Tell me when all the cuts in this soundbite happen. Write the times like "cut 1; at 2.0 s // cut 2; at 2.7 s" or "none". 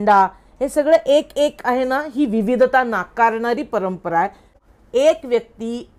cut 1; at 4.6 s